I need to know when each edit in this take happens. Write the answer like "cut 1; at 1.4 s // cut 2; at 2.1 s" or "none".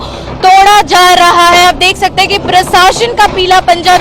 none